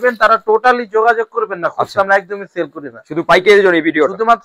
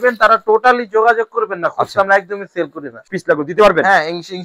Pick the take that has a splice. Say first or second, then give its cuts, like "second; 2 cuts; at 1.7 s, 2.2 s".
second; 1 cut; at 3.1 s